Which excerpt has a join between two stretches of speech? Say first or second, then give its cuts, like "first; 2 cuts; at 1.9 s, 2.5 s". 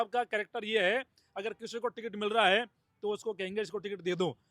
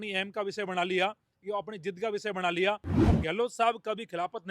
second; 1 cut; at 3.0 s